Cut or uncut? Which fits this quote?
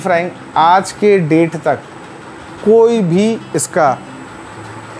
uncut